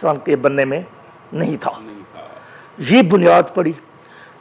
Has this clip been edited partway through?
no; 0 cuts

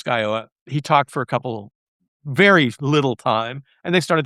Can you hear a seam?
no; 0 cuts

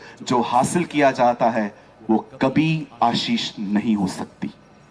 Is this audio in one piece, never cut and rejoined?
yes; 0 cuts

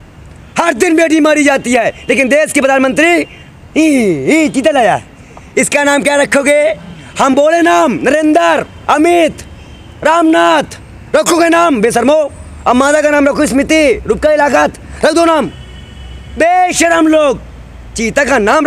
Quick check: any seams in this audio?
no; 0 cuts

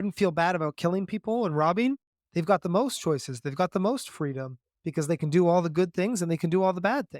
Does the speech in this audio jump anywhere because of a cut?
no; 0 cuts

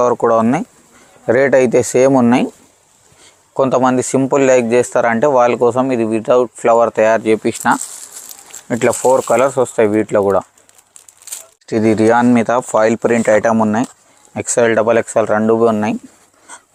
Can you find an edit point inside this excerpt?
no; 0 cuts

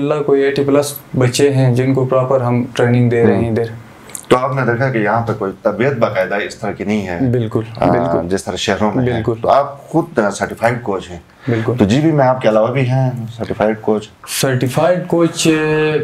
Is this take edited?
no; 0 cuts

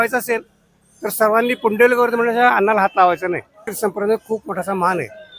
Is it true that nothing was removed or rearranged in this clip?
no; 1 cut; at 3.7 s

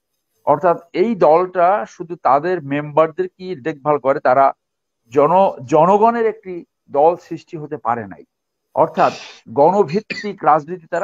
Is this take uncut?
yes; 0 cuts

